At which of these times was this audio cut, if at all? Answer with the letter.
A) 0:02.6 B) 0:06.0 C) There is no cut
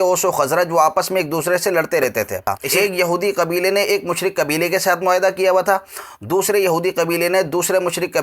A